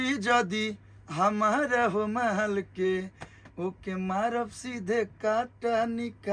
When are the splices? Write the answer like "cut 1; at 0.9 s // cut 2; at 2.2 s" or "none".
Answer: none